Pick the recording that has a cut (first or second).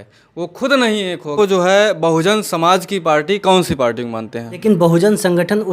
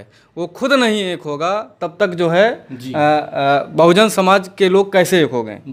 first